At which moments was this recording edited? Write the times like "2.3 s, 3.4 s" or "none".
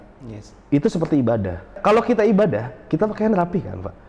1.7 s

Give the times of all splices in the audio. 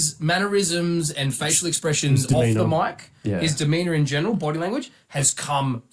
none

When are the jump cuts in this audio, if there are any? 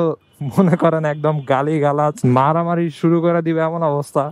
2.2 s

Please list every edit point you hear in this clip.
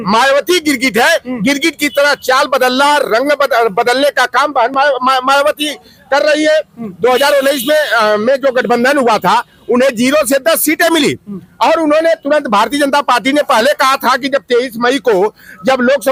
none

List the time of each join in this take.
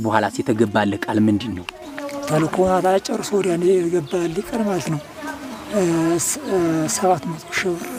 none

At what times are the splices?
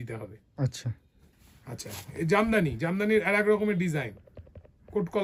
none

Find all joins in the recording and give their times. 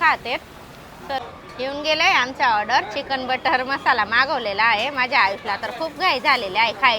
1.2 s

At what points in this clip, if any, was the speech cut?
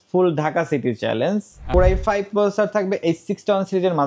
1.6 s

